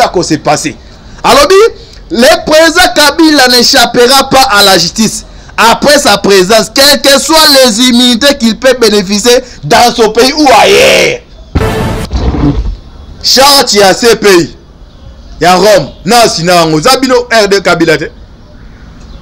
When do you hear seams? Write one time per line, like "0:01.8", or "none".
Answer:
0:11.6